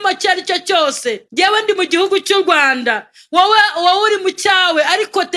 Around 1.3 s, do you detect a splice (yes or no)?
no